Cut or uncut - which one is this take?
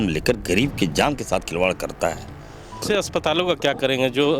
cut